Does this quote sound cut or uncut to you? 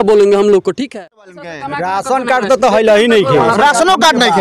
cut